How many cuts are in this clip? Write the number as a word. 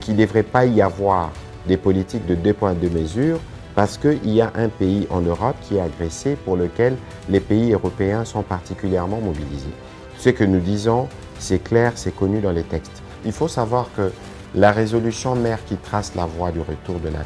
one